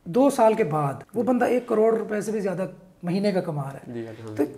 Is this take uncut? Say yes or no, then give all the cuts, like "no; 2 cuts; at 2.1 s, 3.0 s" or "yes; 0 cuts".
no; 1 cut; at 1.0 s